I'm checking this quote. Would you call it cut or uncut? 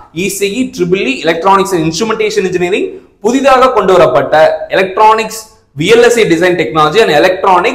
uncut